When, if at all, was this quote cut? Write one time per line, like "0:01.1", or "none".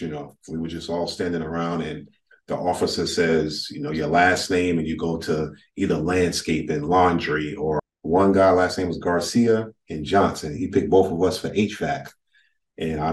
0:07.9